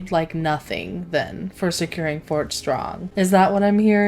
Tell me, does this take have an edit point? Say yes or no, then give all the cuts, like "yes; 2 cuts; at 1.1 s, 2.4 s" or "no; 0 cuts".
yes; 1 cut; at 3.0 s